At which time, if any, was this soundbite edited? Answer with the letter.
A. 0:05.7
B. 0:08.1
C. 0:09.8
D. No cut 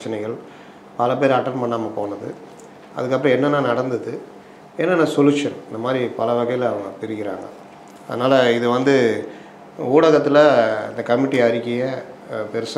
D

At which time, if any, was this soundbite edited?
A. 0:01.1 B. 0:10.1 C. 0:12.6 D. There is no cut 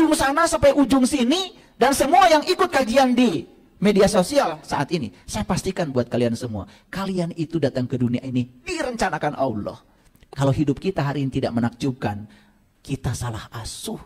B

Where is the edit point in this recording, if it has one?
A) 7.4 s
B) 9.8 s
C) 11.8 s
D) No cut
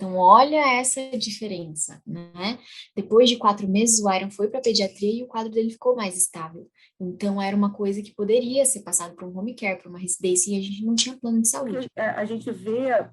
C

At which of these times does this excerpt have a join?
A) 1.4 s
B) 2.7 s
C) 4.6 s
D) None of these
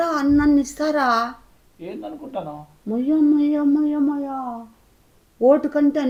D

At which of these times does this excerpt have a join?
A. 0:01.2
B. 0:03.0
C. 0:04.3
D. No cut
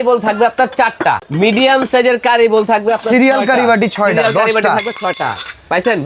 A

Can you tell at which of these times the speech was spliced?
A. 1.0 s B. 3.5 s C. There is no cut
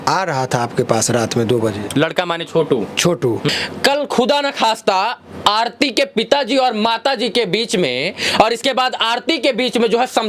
B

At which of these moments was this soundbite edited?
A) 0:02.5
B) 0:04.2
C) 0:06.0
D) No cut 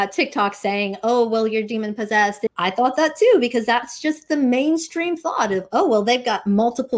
A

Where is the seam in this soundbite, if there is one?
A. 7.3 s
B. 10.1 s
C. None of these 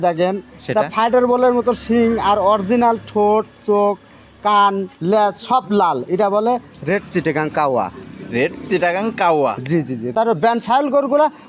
B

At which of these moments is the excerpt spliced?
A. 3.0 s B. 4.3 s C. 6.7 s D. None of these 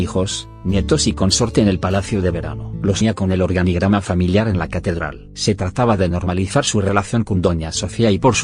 D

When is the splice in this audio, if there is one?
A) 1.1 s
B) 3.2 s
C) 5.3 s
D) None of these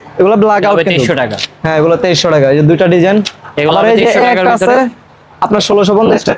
D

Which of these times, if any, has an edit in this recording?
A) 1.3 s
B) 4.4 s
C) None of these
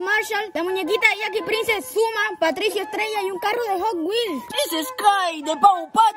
B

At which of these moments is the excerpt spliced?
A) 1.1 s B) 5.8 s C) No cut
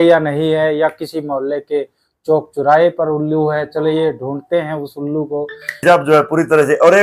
B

